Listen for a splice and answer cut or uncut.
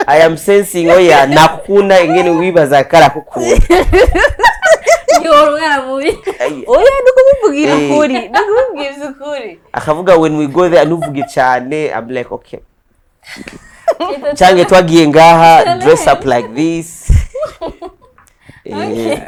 uncut